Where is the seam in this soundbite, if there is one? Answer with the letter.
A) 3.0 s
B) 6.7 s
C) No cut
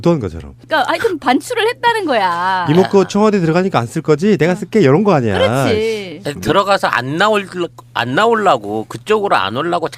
A